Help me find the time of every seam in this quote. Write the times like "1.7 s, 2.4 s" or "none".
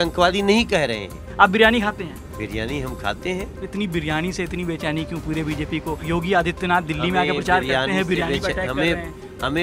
1.3 s, 2.2 s, 3.6 s, 6.0 s